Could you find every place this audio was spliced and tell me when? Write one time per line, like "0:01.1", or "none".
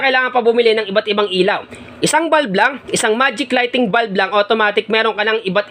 none